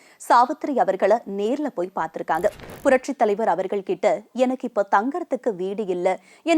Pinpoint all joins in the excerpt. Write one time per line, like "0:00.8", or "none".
0:02.7